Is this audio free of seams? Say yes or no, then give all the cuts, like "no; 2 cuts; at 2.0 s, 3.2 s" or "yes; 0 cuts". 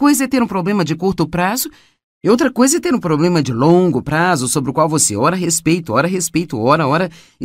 no; 1 cut; at 2.6 s